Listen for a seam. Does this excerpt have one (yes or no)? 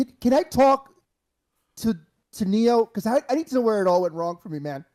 no